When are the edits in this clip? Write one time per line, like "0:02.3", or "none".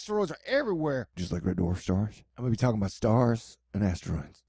none